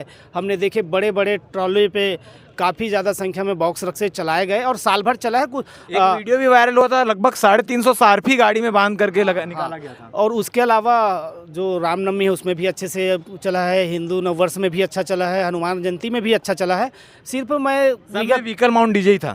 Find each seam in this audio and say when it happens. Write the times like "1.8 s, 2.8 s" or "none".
none